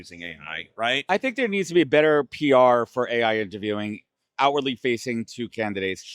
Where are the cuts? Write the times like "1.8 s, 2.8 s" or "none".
1.0 s